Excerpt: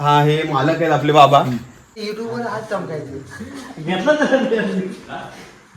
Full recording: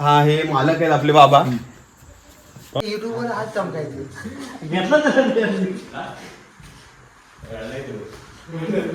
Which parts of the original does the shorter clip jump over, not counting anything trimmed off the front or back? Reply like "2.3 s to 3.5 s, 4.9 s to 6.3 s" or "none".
2.0 s to 2.9 s